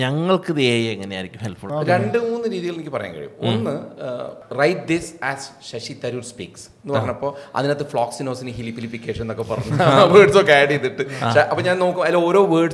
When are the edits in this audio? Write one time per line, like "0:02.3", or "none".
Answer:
0:01.6
0:04.4